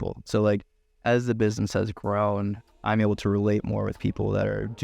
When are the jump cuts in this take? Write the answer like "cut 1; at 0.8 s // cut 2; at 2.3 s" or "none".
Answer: none